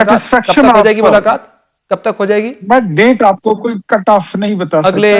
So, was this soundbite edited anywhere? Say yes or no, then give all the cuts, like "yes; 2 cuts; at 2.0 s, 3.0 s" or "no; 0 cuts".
no; 0 cuts